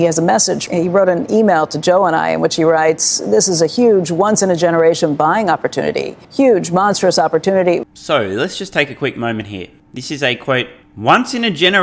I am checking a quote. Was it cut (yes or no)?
no